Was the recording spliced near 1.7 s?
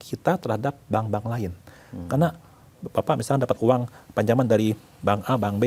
no; 0 cuts

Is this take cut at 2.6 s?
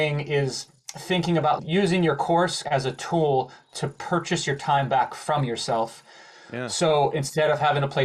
yes; 2 cuts; at 1.6 s, 2.6 s

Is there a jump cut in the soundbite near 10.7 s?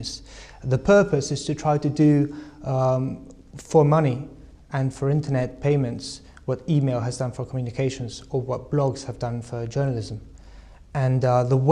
no; 1 cut; at 8.4 s

